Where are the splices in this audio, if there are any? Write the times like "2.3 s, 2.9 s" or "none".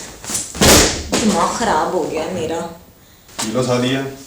3.3 s